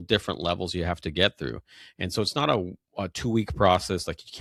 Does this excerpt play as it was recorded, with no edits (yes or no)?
yes